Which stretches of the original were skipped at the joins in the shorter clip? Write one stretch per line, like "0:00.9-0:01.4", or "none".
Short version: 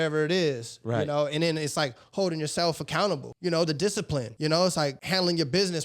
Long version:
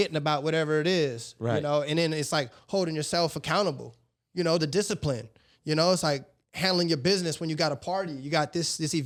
0:03.9-0:04.2
0:05.2-0:05.6
0:06.3-0:06.5